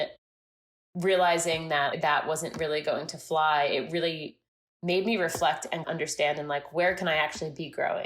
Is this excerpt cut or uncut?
cut